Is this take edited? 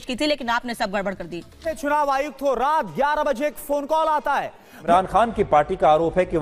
yes; 2 cuts; at 1.7 s, 4.9 s

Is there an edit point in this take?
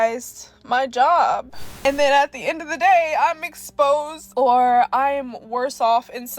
yes; 1 cut; at 1.7 s

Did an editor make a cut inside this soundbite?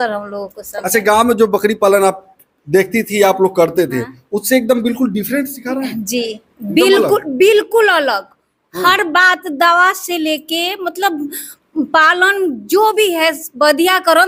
no; 0 cuts

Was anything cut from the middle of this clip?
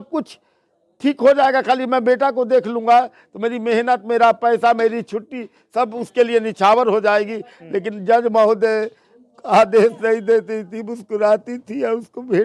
no; 0 cuts

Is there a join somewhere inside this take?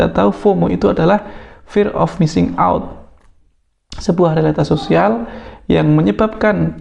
no; 0 cuts

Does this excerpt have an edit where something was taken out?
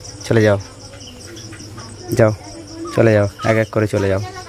yes; 1 cut; at 2.0 s

